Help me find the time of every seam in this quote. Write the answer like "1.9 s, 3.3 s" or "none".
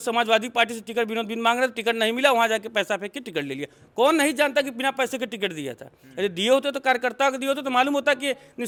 none